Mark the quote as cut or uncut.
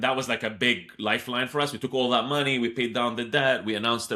uncut